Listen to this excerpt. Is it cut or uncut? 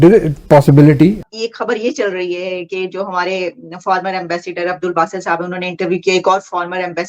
cut